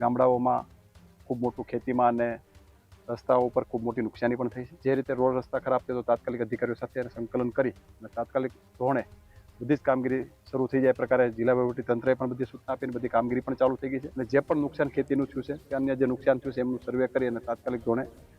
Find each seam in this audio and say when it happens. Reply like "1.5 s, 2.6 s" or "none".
4.7 s, 14.1 s